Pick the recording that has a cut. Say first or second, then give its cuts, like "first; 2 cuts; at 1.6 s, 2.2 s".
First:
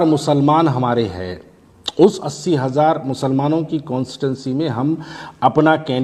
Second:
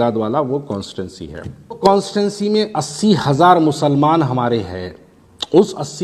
second; 1 cut; at 1.8 s